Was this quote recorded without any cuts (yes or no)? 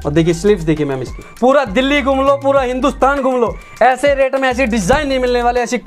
no